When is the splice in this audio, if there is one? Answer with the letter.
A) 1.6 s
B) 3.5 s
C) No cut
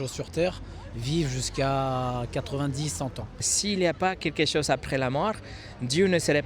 B